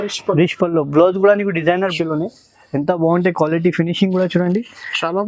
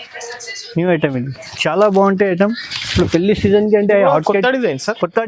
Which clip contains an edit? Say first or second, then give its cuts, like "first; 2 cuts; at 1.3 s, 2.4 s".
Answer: first; 1 cut; at 1.9 s